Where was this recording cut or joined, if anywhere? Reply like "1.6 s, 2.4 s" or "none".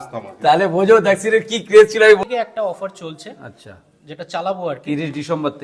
2.2 s